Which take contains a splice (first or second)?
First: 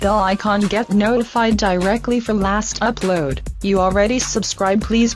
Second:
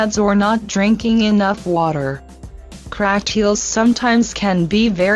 second